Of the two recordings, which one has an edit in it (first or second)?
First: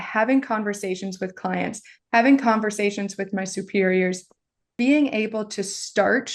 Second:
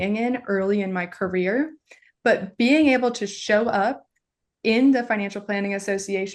first